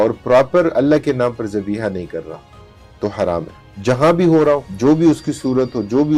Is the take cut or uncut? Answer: uncut